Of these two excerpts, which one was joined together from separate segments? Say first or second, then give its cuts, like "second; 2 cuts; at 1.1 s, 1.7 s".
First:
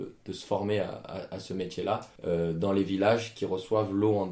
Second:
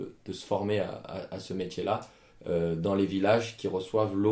first; 1 cut; at 2.1 s